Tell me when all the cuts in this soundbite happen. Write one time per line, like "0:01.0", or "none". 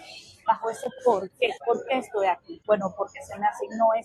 0:01.6
0:02.5

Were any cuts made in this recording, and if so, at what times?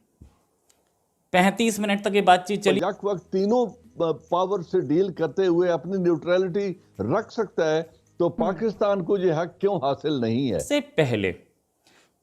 0:02.8
0:10.6

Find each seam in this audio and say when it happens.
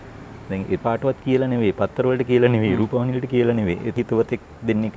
0:00.8
0:03.9

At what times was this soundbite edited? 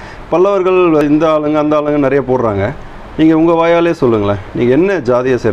0:01.0

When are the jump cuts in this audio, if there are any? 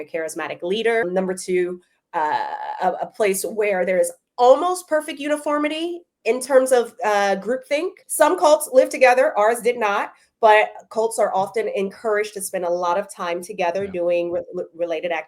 0:01.0
0:08.0

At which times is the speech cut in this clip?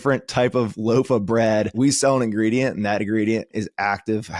0:01.7
0:03.5

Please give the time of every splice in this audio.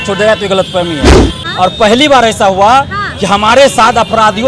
0:01.4

